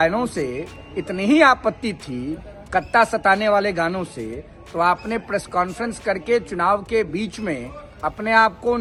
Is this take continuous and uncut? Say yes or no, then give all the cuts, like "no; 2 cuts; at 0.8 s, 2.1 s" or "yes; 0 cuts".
yes; 0 cuts